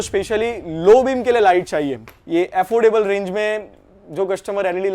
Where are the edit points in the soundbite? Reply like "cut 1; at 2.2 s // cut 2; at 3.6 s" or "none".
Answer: cut 1; at 2.0 s